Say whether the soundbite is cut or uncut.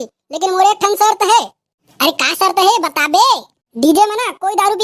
uncut